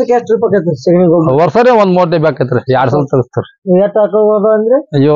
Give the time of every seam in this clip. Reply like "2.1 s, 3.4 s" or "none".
none